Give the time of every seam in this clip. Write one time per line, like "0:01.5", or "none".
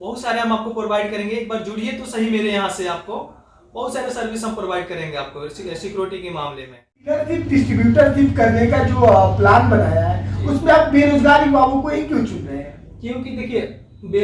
0:07.2